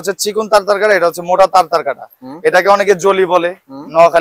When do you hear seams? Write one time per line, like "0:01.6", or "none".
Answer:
none

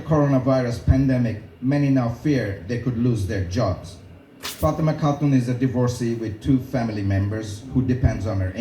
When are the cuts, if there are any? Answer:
0:07.3

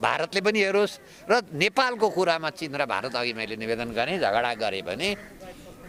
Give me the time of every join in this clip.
none

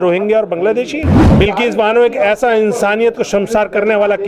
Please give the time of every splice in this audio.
0:01.2

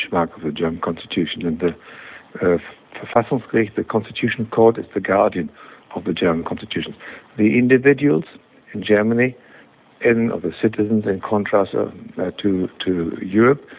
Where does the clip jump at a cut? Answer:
none

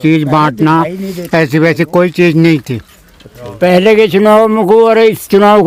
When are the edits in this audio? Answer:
none

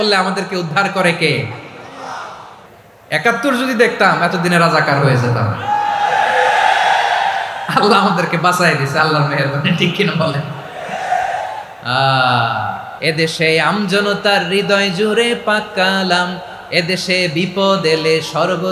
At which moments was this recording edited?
0:02.5
0:12.9

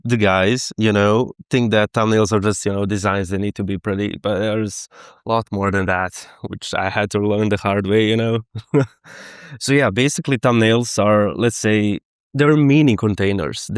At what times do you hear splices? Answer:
none

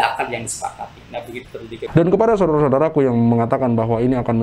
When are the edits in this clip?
0:01.9

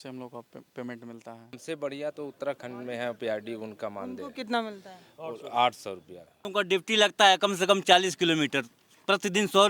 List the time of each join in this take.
0:01.6
0:06.5

